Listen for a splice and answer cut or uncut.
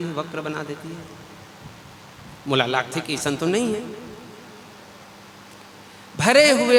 uncut